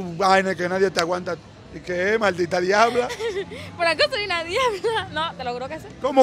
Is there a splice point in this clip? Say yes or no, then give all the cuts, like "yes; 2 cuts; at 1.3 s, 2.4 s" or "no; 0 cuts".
no; 0 cuts